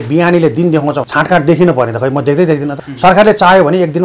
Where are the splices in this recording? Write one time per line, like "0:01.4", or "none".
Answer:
0:01.0
0:02.8